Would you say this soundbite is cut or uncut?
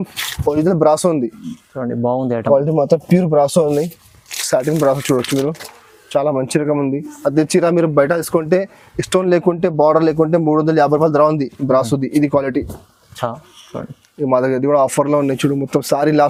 uncut